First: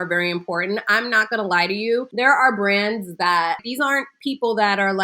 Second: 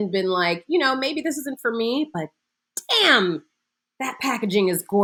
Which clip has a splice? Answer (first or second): first